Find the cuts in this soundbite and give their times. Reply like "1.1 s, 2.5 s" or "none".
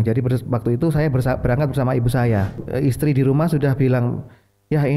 2.6 s